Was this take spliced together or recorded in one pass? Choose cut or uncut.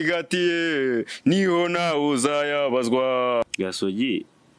cut